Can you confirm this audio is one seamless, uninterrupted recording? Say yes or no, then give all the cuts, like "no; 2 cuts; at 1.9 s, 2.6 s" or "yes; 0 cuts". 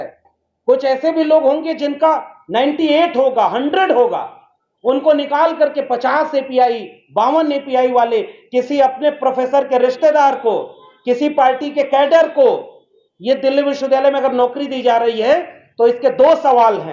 yes; 0 cuts